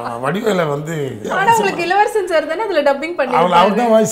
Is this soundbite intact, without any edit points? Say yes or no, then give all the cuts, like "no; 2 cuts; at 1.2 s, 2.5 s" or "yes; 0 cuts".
no; 1 cut; at 1.2 s